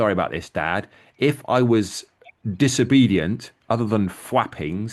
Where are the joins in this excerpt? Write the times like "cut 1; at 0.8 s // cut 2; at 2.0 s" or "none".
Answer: none